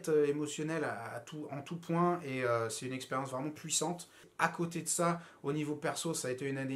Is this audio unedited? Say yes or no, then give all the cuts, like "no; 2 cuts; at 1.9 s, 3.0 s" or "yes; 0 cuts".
no; 1 cut; at 4.2 s